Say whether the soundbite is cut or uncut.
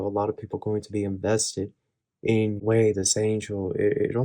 cut